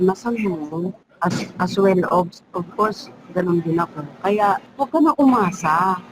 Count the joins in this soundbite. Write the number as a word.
two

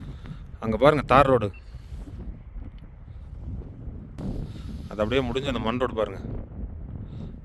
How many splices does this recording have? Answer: one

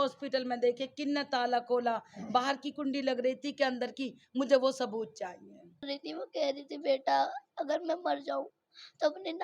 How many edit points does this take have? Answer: one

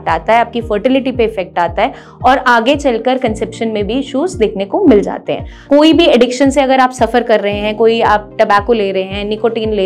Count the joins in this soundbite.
one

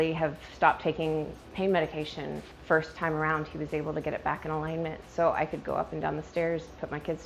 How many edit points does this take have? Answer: two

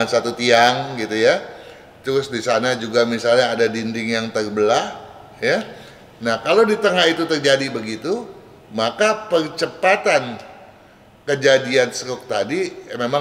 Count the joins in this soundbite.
zero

